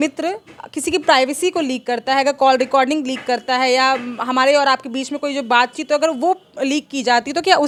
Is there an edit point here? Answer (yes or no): no